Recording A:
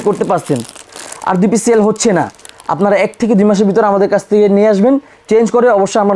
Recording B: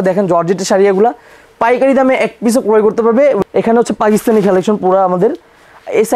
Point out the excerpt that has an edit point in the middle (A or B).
B